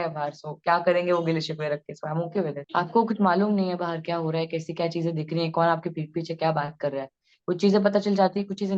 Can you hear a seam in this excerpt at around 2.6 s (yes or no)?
yes